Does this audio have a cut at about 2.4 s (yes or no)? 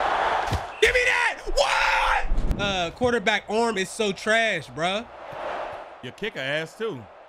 yes